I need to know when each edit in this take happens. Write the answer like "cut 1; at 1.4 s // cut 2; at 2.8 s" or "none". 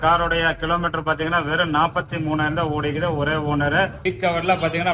cut 1; at 4.0 s